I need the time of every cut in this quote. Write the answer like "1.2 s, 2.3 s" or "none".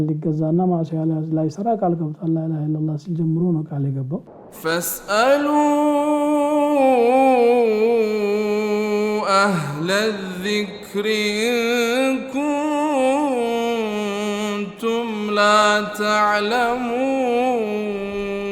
4.4 s